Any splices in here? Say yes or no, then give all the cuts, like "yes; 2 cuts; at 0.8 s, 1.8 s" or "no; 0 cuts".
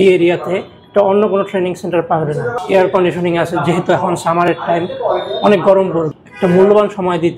yes; 2 cuts; at 2.6 s, 6.2 s